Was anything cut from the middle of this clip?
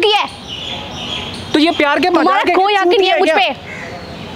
no; 0 cuts

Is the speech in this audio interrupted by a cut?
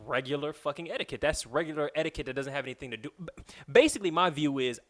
no; 0 cuts

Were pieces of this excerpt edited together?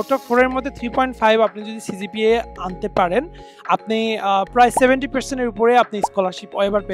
no; 0 cuts

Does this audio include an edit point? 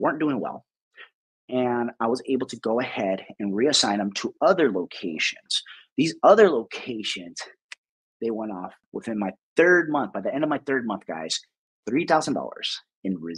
yes; 1 cut; at 8.9 s

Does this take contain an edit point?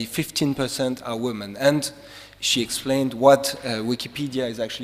no; 0 cuts

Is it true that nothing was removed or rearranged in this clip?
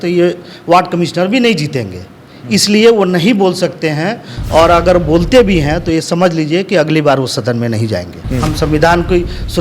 no; 1 cut; at 8.2 s

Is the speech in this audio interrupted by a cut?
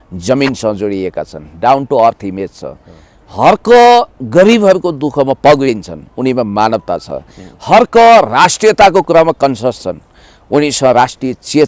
no; 0 cuts

